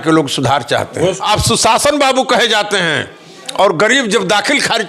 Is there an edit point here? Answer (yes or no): yes